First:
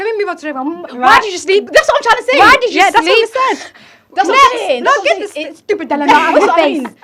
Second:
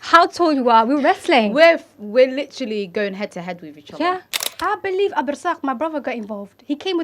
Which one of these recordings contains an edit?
second; 1 cut; at 4.4 s

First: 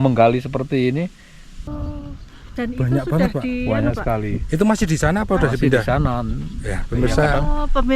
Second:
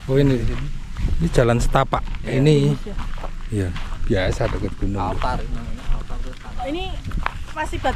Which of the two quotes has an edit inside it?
first; 1 cut; at 1.7 s

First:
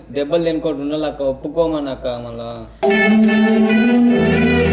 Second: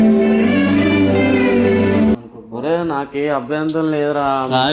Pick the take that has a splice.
second; 1 cut; at 2.4 s

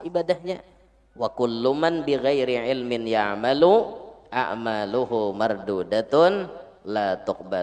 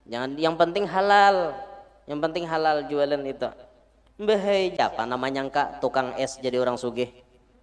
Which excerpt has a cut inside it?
second; 1 cut; at 4.8 s

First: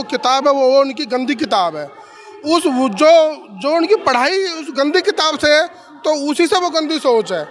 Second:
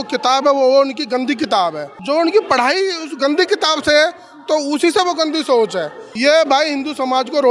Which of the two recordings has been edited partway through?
second; 2 cuts; at 1.9 s, 6.0 s

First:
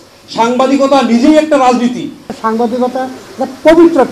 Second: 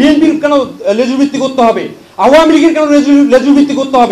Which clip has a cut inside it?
first; 1 cut; at 2.4 s

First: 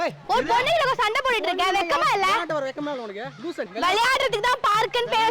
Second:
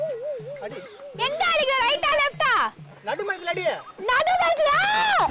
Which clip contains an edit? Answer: first; 1 cut; at 3.7 s

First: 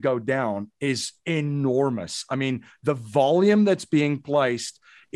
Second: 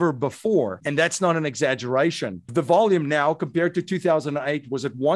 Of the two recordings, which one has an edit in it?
second; 2 cuts; at 0.8 s, 2.5 s

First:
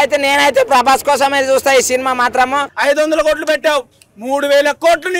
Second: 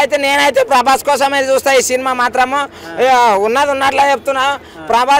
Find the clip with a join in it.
first; 1 cut; at 2.7 s

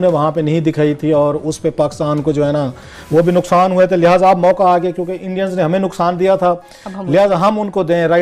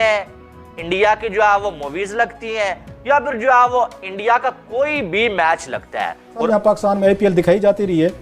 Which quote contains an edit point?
second; 1 cut; at 6.5 s

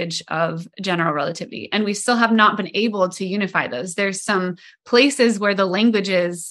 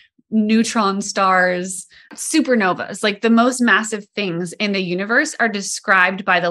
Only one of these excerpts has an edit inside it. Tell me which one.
second; 1 cut; at 2.1 s

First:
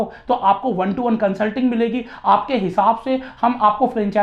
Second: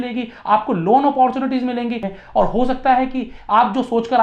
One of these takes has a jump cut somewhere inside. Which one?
second; 1 cut; at 2.1 s

